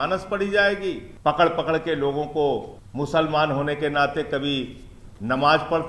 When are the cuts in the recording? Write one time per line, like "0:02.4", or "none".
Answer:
0:01.1
0:02.8